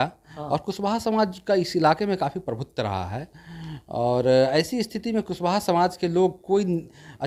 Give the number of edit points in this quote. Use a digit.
0